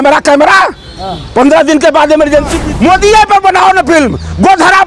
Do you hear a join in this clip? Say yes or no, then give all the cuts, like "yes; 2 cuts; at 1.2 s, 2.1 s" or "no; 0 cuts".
yes; 1 cut; at 2.6 s